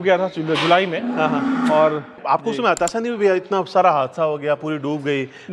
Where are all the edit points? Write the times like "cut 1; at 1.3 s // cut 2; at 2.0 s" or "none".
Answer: cut 1; at 2.2 s